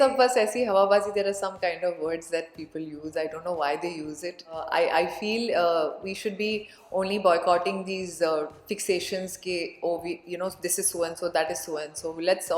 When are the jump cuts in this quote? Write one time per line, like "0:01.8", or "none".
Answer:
0:04.6

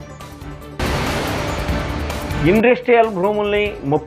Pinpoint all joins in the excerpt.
0:00.8
0:02.4

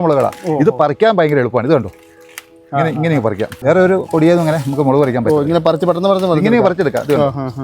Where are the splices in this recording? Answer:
0:03.5

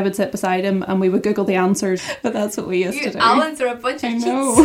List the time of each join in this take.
0:02.0

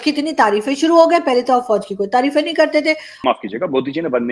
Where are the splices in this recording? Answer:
0:03.2

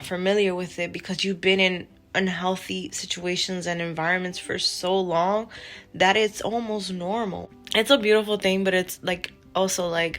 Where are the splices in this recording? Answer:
0:07.4

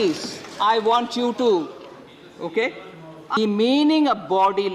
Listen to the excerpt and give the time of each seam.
0:03.4

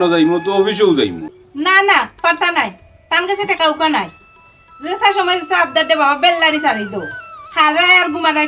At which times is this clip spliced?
0:01.3

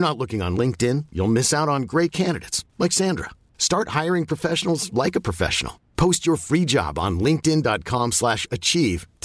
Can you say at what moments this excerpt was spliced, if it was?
none

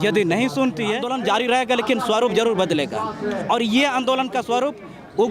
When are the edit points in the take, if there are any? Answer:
0:01.1

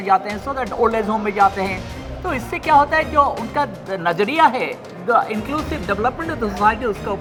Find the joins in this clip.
none

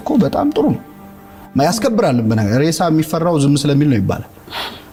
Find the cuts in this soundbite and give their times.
none

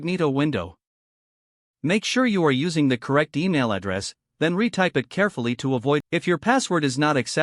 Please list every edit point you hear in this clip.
0:06.1

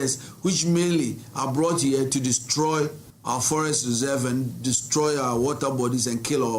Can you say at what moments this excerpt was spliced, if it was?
none

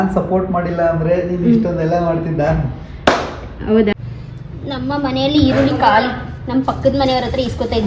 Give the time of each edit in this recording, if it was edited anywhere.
0:03.9

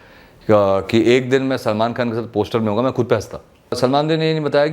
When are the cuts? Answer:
0:03.8

